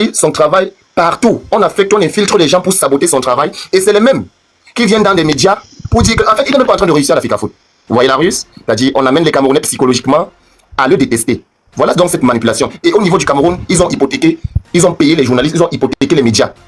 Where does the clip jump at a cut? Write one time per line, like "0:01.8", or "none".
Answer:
none